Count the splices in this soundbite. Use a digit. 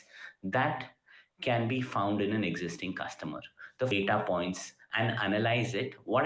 1